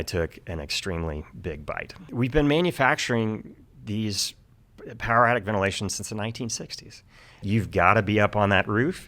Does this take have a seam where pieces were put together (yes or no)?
yes